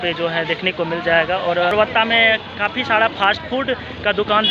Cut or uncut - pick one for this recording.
cut